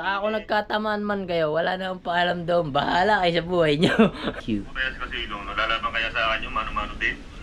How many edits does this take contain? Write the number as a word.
one